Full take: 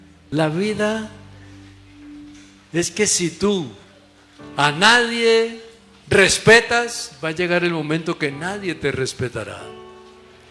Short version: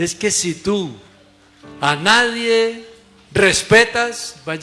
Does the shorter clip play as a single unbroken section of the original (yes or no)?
yes